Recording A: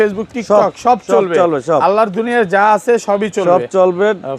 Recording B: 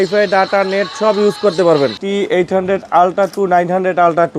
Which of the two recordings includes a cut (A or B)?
B